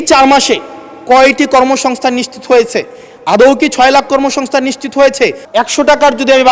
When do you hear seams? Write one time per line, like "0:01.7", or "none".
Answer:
0:05.4